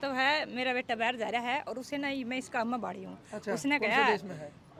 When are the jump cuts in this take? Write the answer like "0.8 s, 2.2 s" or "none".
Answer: none